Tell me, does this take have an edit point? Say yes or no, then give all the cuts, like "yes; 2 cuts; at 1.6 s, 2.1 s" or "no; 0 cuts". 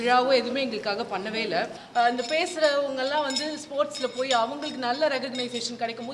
yes; 1 cut; at 1.8 s